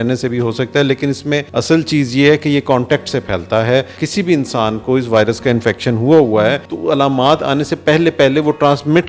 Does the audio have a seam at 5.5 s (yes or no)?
no